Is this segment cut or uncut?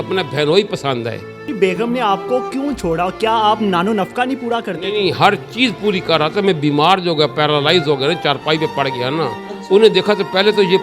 uncut